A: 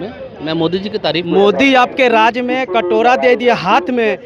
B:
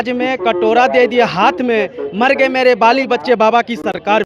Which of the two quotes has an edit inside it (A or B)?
A